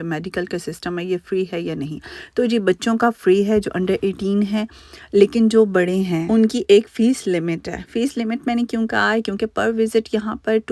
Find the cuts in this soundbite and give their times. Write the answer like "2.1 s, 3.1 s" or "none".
none